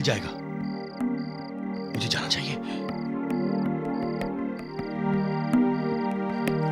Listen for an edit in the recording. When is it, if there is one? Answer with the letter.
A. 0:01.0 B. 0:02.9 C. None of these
C